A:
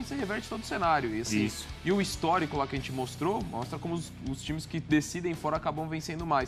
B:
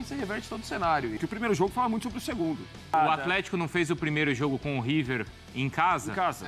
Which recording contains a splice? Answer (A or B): B